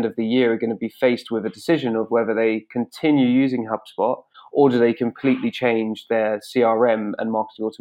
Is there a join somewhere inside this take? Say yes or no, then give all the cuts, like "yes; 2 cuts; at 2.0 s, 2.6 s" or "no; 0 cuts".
no; 0 cuts